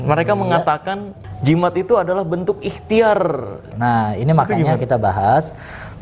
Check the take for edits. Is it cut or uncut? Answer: cut